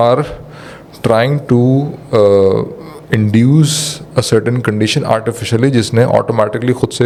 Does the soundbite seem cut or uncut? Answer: uncut